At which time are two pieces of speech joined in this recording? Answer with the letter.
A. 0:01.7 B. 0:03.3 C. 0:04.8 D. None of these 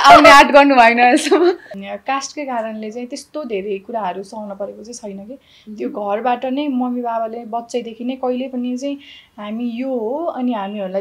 A